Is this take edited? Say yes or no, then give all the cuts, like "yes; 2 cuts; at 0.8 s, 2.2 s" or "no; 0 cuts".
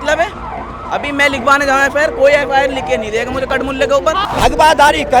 yes; 1 cut; at 4.2 s